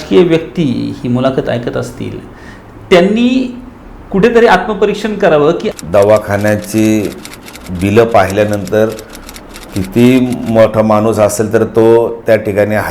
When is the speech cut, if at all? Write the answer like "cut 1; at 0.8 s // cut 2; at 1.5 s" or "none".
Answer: cut 1; at 5.7 s

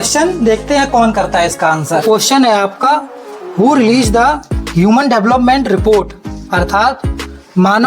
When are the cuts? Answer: cut 1; at 2.0 s

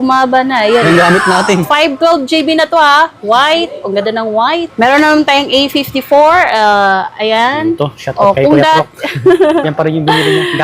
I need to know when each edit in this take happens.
cut 1; at 4.7 s

